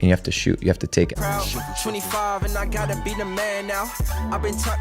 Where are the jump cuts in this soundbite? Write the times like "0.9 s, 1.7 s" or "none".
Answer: 1.1 s